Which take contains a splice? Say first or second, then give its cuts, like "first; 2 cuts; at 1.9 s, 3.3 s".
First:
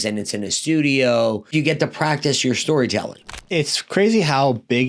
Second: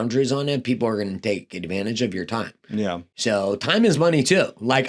first; 2 cuts; at 1.5 s, 3.4 s